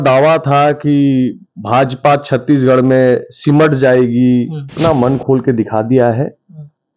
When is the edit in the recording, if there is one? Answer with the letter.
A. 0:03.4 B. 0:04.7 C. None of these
B